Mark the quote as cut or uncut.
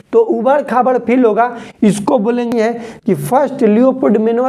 cut